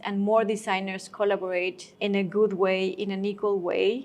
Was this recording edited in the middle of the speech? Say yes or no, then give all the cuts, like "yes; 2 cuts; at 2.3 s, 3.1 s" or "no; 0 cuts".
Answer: yes; 1 cut; at 1.8 s